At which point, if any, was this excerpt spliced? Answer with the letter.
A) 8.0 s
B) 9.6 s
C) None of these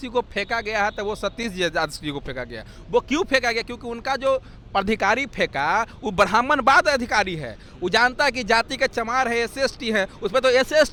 C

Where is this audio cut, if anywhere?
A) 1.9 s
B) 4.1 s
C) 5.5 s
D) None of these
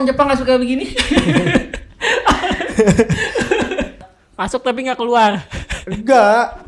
B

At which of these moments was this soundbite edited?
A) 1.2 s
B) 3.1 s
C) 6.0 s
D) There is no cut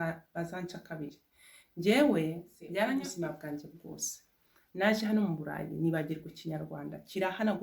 B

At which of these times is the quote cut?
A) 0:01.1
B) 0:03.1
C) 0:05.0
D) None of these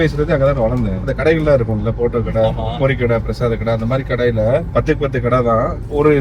A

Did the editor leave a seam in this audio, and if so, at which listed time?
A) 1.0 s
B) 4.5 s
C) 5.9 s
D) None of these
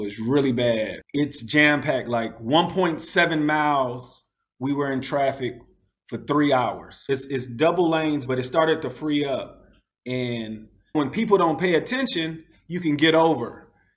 A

